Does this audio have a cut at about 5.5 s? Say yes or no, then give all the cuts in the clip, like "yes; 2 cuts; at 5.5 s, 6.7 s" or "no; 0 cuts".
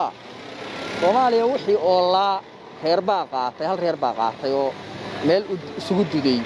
no; 0 cuts